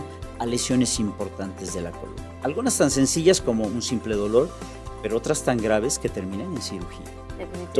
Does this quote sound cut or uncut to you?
uncut